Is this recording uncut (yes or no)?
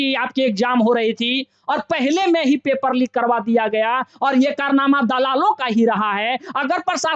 yes